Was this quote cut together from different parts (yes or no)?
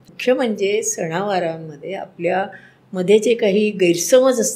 no